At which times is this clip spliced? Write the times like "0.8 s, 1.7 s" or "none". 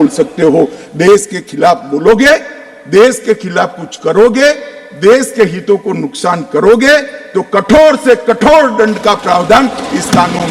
none